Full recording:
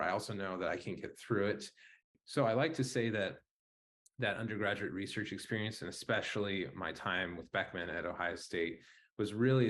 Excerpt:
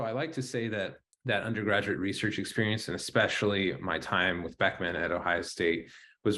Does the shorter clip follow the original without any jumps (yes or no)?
no